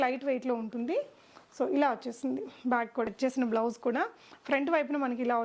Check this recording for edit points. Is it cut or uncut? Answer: cut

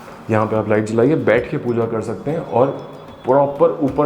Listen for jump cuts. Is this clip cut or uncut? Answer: uncut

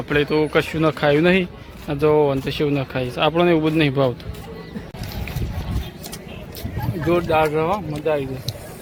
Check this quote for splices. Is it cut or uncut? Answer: uncut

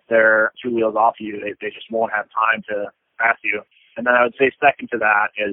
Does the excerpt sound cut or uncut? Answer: cut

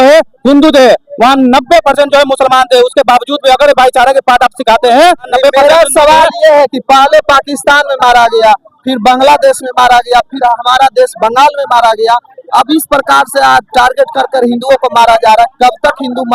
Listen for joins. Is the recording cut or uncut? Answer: cut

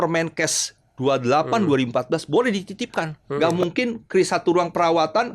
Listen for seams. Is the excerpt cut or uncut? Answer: cut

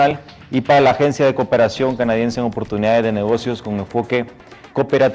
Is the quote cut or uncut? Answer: cut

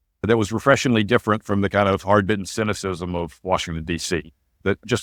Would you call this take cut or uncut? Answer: uncut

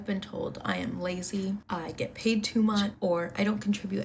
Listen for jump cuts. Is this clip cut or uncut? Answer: cut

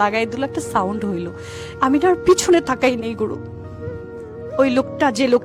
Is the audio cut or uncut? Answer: uncut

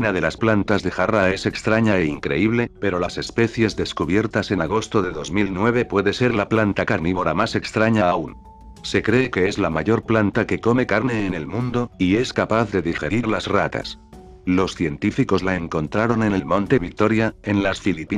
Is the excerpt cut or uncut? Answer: cut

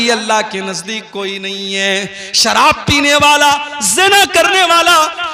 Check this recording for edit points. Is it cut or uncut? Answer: uncut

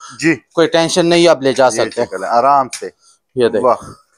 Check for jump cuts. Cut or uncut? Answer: uncut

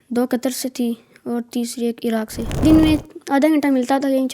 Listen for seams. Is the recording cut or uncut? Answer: cut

